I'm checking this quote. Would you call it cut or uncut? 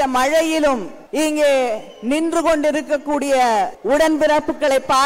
cut